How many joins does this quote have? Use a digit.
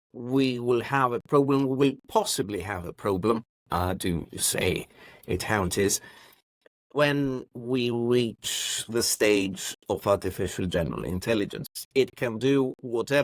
1